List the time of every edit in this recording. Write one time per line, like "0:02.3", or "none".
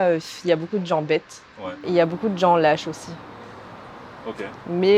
none